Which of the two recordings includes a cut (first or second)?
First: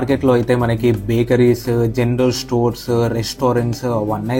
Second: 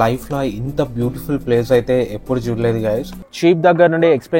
second